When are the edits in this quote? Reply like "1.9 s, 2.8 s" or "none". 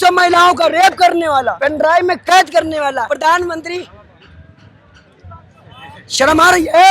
1.6 s, 3.1 s

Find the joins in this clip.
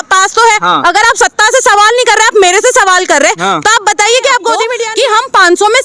4.8 s

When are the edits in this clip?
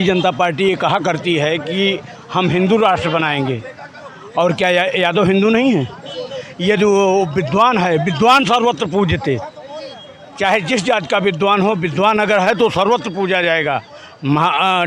none

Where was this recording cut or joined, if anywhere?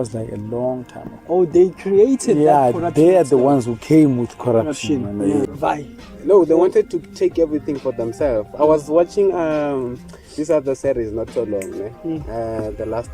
5.5 s

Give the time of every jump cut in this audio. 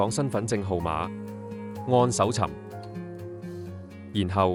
none

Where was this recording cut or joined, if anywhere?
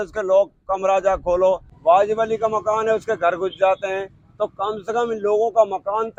none

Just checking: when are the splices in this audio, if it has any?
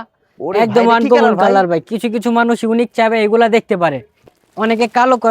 4.2 s

